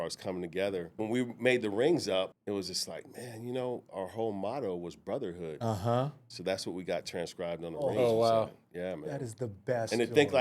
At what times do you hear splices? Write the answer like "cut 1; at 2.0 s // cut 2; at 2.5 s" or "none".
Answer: cut 1; at 1.0 s // cut 2; at 2.4 s